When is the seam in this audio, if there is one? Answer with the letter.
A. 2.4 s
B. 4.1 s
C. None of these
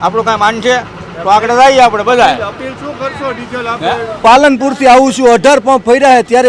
B